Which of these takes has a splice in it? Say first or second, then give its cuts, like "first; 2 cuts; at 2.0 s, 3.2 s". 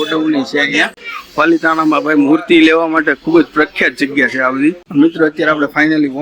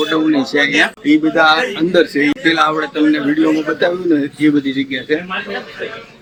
first; 2 cuts; at 0.9 s, 4.8 s